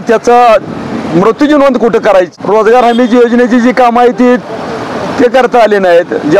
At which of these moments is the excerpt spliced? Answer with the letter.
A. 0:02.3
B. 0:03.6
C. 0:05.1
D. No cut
A